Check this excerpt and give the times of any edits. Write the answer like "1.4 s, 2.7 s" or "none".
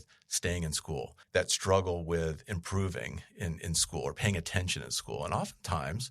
1.2 s